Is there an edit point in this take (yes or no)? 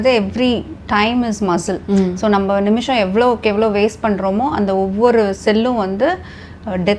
no